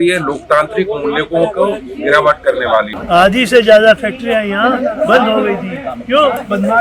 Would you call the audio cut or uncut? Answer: cut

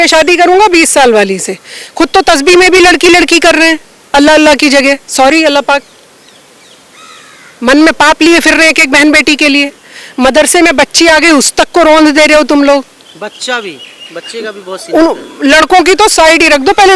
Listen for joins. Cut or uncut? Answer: uncut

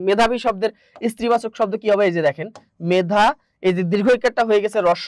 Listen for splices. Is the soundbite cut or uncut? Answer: uncut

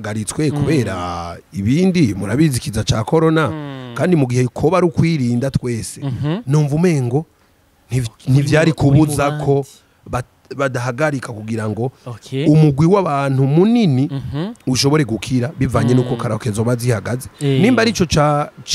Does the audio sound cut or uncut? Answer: uncut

